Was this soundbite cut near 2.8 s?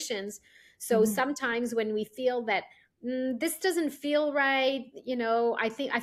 no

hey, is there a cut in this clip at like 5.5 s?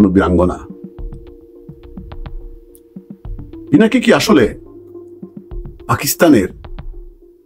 no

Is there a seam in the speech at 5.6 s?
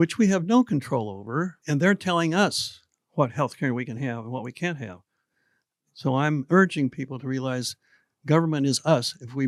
no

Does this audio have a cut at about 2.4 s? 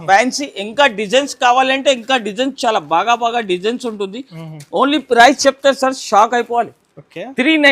no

